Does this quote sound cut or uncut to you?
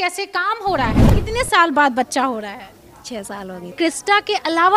cut